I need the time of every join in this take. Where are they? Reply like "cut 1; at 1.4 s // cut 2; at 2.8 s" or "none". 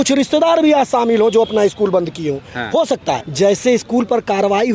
cut 1; at 3.3 s